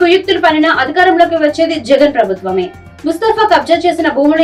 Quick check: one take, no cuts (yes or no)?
yes